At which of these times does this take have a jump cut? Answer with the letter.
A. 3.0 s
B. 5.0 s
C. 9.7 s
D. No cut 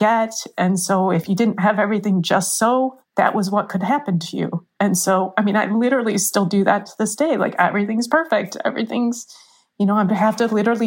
A